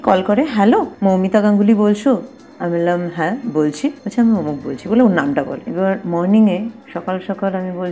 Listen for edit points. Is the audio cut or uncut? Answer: cut